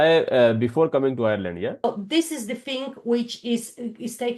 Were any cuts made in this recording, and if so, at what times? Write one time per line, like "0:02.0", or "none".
0:01.8